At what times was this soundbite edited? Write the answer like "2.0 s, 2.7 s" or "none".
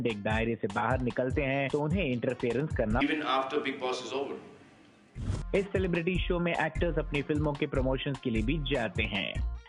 none